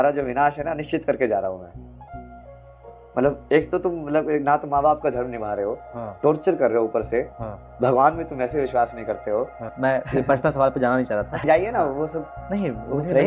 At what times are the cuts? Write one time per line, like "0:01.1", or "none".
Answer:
0:09.7
0:11.4